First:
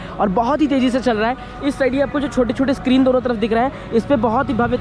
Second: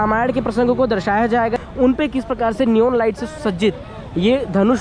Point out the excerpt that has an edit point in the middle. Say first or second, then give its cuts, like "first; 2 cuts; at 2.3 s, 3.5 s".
second; 1 cut; at 1.6 s